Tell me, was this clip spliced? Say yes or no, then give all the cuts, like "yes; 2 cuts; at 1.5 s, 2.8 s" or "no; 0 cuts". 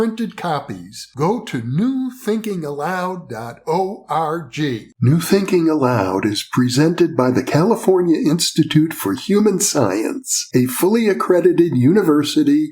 yes; 1 cut; at 4.9 s